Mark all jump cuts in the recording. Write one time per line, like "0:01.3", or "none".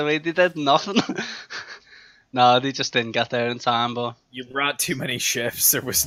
none